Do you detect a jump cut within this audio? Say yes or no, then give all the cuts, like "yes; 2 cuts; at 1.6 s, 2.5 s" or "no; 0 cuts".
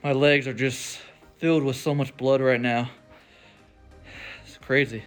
no; 0 cuts